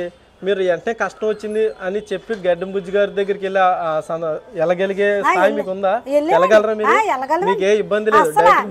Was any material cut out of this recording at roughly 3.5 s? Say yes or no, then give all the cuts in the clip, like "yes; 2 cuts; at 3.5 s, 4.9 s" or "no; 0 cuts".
no; 0 cuts